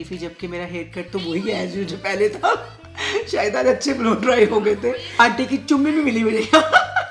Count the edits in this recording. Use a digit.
1